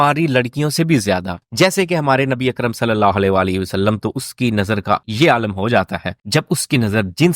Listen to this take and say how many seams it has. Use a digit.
1